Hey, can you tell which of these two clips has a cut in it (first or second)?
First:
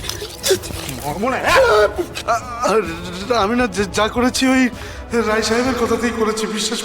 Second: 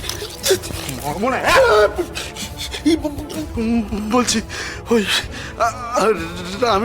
first